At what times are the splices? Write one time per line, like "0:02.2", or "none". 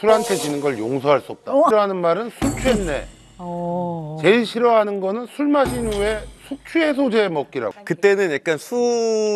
0:01.7
0:07.7